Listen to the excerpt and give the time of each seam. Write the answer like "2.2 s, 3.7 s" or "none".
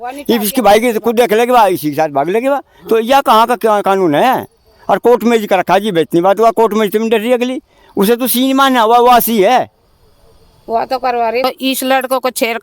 11.4 s